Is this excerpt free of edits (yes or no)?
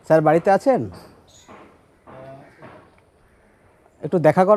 yes